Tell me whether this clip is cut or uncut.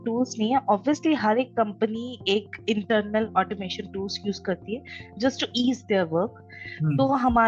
uncut